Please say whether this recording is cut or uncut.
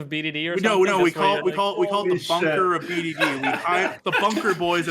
cut